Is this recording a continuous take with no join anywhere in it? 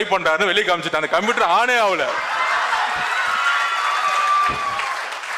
yes; 0 cuts

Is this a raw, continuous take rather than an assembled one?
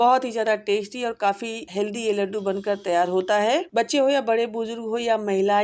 no; 2 cuts; at 1.6 s, 3.7 s

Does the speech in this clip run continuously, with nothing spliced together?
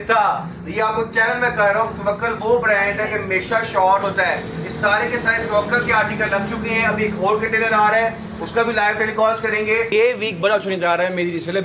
no; 1 cut; at 9.9 s

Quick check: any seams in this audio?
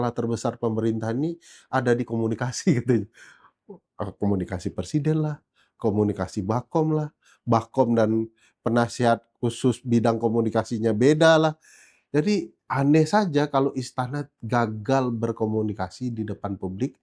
no; 0 cuts

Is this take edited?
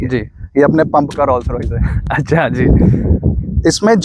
no; 0 cuts

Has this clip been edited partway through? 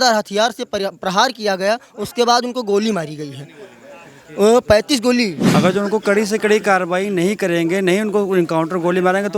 yes; 1 cut; at 5.4 s

